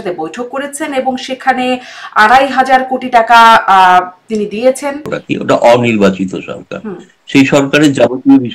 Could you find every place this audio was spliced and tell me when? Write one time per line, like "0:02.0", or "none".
0:05.1